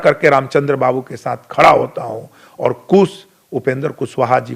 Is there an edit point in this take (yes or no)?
no